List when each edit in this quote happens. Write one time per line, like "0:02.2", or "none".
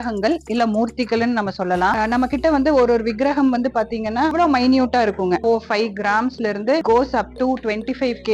none